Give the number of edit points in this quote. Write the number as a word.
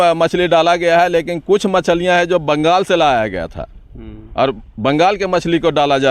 zero